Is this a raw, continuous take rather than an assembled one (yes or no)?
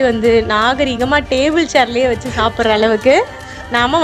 yes